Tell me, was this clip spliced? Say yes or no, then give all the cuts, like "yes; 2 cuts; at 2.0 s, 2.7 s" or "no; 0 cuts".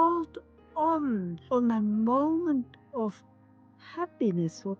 yes; 1 cut; at 1.3 s